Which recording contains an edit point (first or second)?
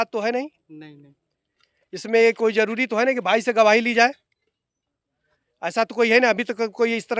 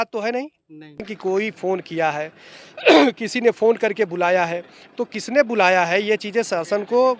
second